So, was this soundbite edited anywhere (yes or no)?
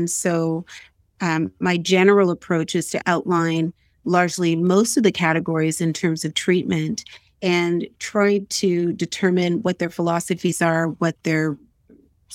no